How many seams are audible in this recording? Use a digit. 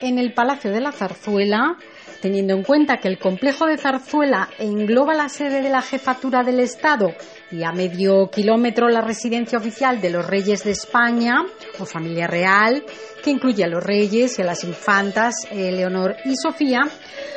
0